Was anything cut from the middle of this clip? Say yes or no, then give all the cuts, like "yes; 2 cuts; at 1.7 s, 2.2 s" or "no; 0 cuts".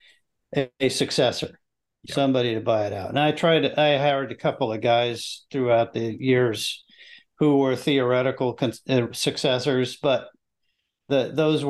no; 0 cuts